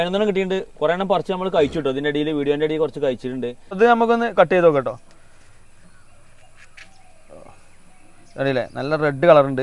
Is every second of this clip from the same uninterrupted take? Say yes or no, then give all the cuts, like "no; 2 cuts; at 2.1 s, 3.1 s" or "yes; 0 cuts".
no; 1 cut; at 3.6 s